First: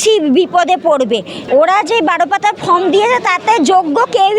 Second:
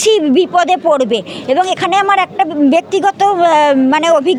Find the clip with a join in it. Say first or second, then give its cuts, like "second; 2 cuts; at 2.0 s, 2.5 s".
first; 1 cut; at 1.3 s